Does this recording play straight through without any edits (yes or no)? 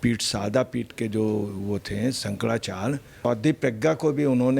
no